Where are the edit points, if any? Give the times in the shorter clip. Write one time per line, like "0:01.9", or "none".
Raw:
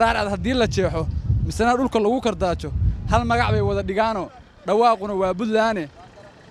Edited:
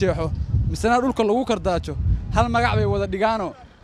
none